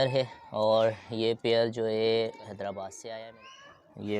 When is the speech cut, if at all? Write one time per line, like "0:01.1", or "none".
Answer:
0:03.3